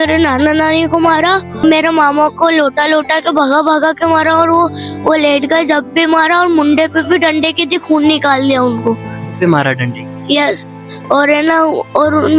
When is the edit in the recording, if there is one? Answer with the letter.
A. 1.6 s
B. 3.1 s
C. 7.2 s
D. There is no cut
A